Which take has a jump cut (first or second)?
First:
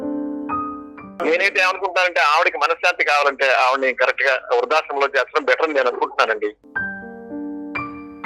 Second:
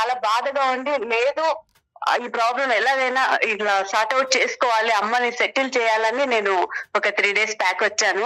first